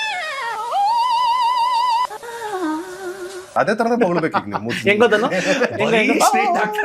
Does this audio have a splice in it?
no; 0 cuts

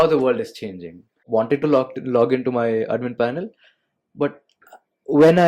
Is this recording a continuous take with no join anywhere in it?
no; 1 cut; at 1.2 s

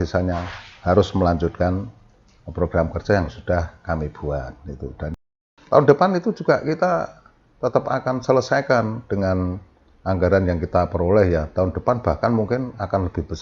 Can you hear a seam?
yes; 1 cut; at 5.1 s

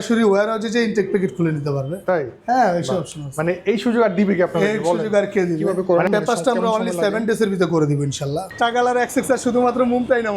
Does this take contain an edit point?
yes; 2 cuts; at 5.8 s, 8.5 s

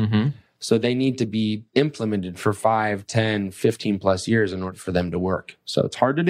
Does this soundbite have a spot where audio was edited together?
yes; 2 cuts; at 1.6 s, 4.7 s

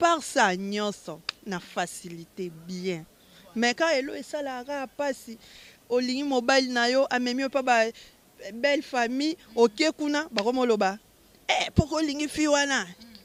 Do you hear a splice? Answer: no; 0 cuts

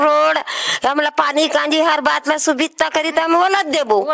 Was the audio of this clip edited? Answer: no; 0 cuts

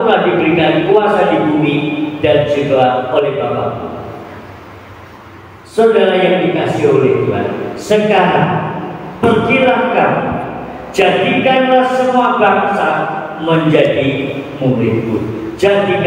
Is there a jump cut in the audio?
no; 0 cuts

